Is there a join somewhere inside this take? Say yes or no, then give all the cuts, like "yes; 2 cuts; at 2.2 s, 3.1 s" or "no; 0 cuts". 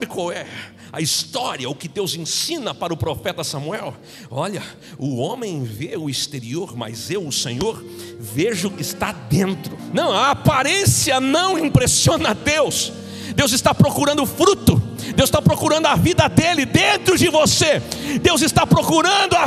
yes; 1 cut; at 9.8 s